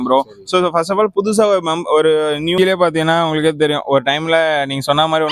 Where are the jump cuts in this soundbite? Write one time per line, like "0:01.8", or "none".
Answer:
0:02.5